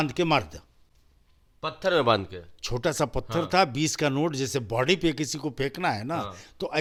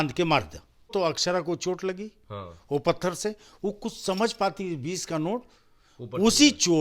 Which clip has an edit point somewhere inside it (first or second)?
second